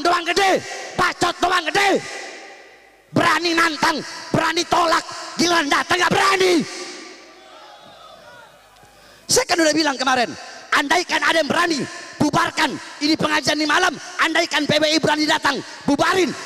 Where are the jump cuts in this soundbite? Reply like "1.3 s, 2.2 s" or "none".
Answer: none